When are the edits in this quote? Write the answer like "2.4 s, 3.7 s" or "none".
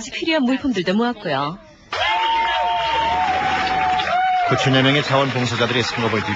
1.9 s